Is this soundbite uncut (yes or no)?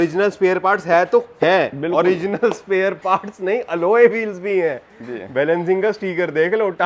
yes